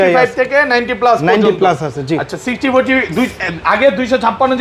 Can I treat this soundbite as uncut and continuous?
yes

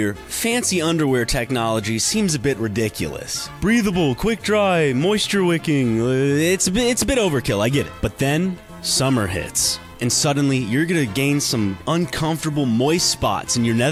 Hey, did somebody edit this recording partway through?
no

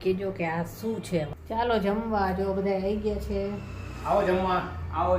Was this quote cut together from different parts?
yes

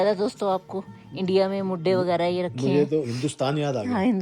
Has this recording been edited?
no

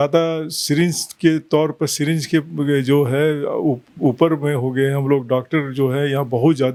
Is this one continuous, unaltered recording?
yes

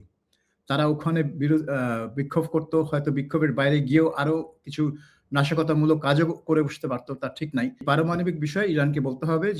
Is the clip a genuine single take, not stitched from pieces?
no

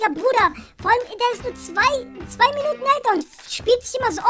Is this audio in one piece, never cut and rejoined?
yes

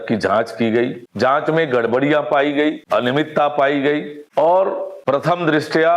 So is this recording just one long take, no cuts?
no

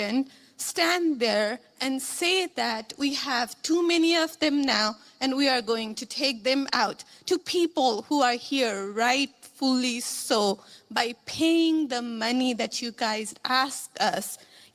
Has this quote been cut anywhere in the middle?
no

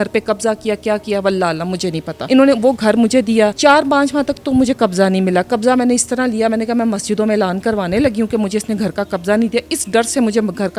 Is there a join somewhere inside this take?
yes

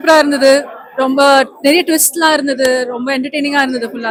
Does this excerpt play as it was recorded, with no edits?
yes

